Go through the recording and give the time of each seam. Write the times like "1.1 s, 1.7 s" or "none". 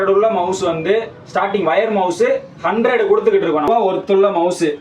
3.7 s